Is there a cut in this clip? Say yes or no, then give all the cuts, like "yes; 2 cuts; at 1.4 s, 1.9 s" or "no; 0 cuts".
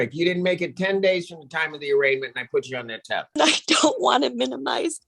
yes; 1 cut; at 3.4 s